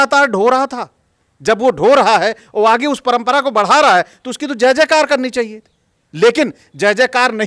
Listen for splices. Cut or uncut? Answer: uncut